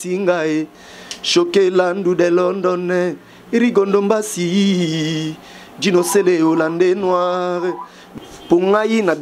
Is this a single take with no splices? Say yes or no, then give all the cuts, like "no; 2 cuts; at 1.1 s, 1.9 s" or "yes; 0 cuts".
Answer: no; 1 cut; at 7.9 s